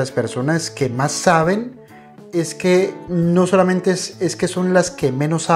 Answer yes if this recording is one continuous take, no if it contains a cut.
yes